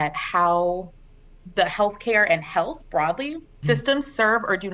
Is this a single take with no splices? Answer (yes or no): no